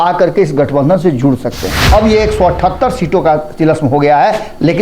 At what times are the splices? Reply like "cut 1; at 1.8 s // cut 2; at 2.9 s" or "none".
cut 1; at 1.7 s